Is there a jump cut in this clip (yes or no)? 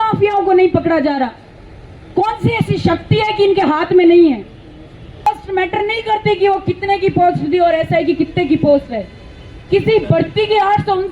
yes